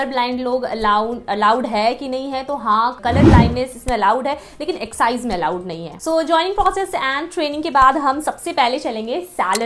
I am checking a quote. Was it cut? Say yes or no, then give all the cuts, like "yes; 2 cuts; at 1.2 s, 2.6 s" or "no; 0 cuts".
no; 0 cuts